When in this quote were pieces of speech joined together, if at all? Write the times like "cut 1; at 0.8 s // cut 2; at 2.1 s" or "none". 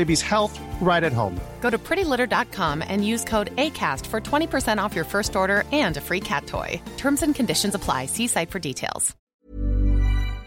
cut 1; at 9.2 s